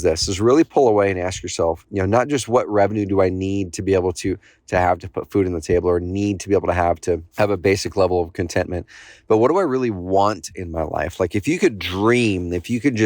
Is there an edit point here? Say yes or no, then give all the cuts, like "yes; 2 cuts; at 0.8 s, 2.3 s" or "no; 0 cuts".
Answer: yes; 2 cuts; at 1.8 s, 7.3 s